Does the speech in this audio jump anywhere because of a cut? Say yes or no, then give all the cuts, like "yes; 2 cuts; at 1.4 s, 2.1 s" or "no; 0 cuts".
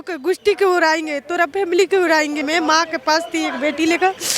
yes; 1 cut; at 2.4 s